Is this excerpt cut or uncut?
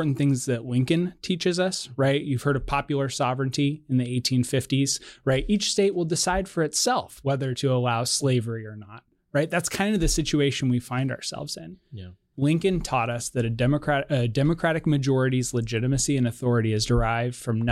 cut